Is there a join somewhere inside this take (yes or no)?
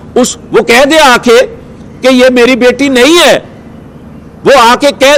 no